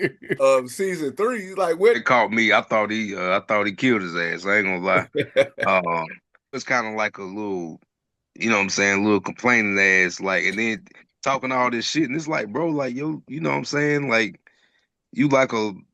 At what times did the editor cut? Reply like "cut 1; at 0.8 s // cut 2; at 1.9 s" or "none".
cut 1; at 2.0 s // cut 2; at 6.6 s